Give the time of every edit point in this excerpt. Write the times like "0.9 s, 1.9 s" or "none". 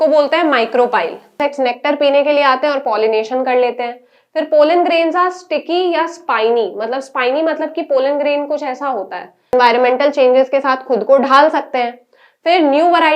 1.4 s, 9.5 s